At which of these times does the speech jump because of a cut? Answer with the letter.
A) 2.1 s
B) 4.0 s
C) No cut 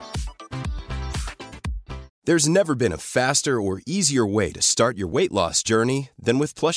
C